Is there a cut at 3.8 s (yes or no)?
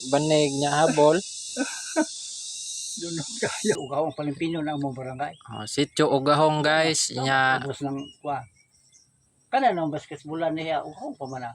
yes